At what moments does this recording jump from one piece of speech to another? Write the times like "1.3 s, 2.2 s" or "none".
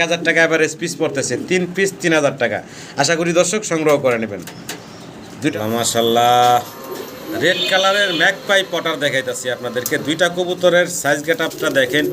5.5 s